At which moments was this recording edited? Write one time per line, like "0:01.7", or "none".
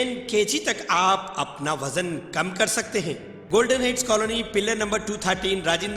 0:03.3